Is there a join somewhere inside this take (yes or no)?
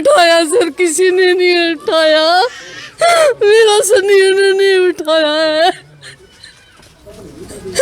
no